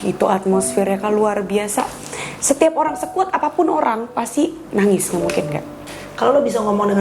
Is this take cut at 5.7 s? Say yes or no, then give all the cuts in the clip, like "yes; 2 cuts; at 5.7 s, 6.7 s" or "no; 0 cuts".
yes; 1 cut; at 5.7 s